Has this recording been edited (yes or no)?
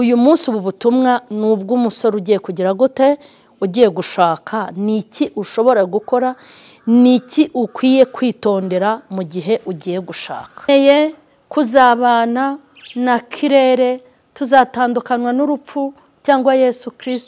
yes